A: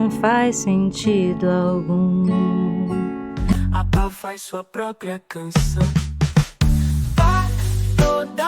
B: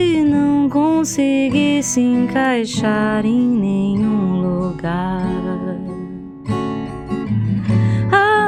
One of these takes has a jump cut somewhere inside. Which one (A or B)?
A